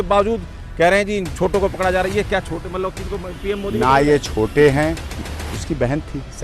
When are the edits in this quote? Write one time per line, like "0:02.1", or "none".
0:05.1